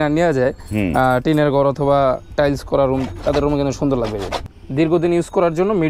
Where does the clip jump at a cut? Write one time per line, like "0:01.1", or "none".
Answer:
0:04.4